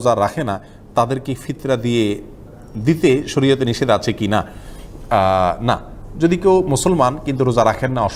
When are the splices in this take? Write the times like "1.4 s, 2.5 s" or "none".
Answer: none